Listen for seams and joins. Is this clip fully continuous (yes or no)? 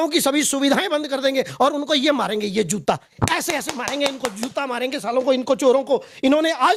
yes